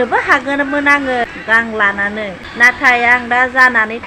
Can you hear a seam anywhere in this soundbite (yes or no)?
yes